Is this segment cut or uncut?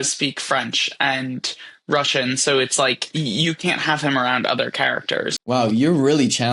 cut